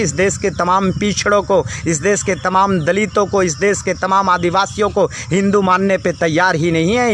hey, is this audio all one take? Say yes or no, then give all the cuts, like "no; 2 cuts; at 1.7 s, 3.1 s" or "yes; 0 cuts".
yes; 0 cuts